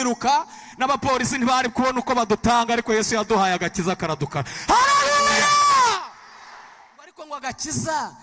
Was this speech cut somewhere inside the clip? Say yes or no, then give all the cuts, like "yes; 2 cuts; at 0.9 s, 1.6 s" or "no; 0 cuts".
yes; 1 cut; at 7.2 s